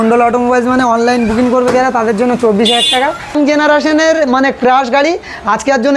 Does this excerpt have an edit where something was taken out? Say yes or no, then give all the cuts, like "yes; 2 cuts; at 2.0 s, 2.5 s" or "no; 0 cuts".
yes; 1 cut; at 3.3 s